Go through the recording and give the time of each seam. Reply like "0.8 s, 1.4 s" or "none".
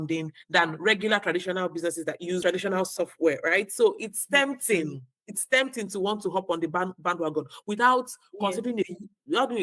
2.4 s